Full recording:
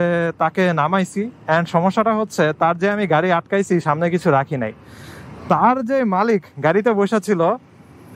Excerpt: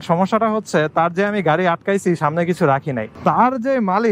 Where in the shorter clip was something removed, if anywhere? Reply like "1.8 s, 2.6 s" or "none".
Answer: 3.1 s